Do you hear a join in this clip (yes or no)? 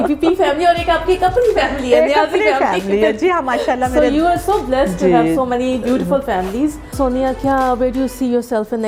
no